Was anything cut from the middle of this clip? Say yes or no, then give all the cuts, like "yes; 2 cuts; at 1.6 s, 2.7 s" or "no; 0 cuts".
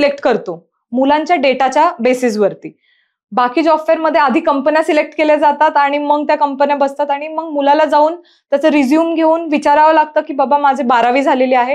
no; 0 cuts